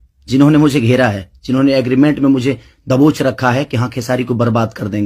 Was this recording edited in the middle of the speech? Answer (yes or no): no